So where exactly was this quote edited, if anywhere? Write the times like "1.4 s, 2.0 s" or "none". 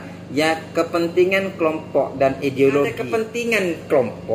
3.1 s